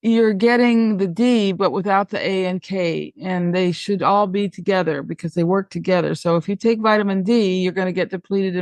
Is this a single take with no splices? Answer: yes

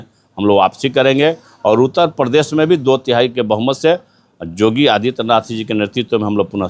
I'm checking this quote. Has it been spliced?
no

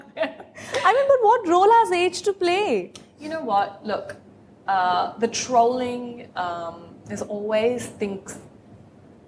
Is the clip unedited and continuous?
yes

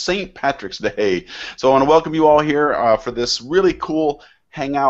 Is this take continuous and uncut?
yes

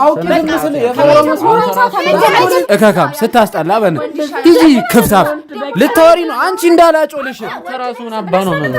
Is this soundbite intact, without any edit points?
no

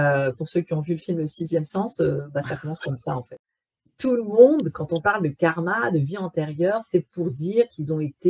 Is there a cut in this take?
yes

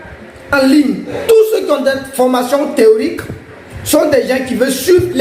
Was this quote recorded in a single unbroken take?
no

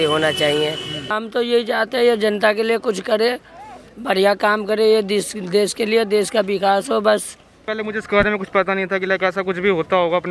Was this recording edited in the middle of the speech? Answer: yes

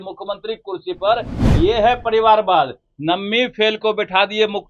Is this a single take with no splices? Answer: yes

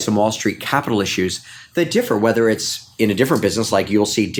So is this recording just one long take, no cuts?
yes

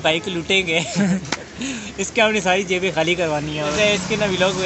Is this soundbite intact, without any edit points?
yes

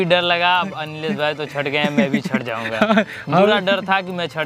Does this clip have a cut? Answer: no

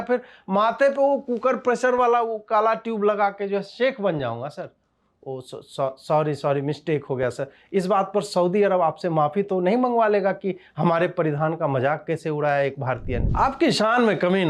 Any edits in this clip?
yes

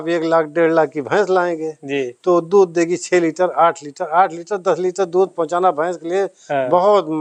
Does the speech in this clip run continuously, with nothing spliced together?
yes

